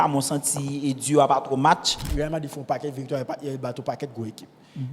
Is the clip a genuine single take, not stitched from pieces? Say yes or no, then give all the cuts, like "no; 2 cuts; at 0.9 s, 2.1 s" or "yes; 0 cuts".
no; 1 cut; at 2.1 s